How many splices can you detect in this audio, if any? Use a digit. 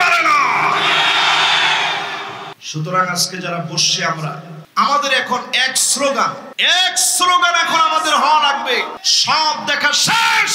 4